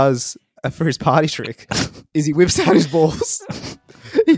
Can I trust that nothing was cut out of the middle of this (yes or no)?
yes